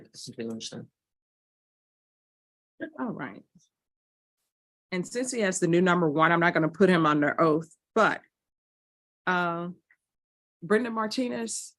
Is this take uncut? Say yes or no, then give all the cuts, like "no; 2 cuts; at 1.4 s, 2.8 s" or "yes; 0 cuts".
yes; 0 cuts